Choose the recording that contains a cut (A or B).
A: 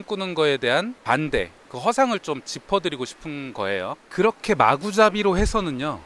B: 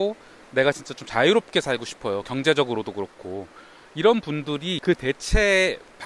A